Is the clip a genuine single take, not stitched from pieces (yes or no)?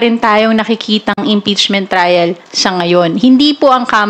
yes